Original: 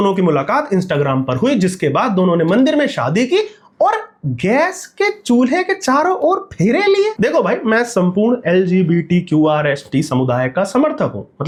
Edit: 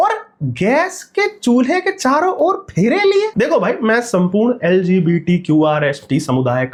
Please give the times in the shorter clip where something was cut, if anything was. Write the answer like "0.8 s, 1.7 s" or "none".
none

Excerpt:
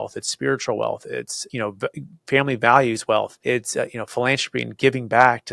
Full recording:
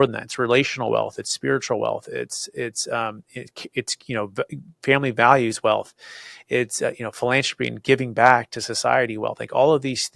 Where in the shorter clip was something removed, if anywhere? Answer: 1.4 s, 3.4 s

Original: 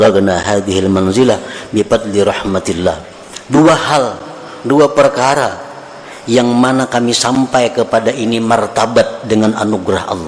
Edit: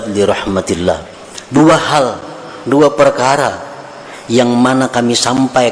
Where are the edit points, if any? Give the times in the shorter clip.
none

